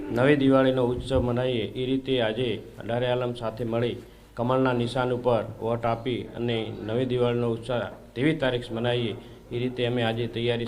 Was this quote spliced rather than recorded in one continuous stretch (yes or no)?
yes